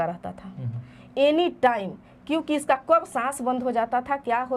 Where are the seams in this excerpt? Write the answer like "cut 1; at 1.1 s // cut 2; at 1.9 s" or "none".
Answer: none